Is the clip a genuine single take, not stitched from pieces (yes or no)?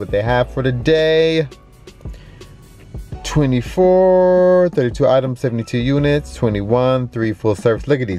yes